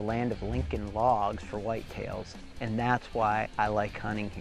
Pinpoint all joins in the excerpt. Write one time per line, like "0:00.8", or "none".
0:03.5